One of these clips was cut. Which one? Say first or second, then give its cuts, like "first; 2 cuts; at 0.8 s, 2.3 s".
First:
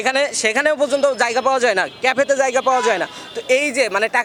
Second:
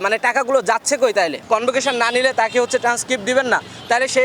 second; 1 cut; at 1.4 s